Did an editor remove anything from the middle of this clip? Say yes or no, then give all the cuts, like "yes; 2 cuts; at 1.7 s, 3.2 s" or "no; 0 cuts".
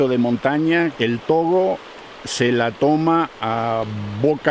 yes; 1 cut; at 0.9 s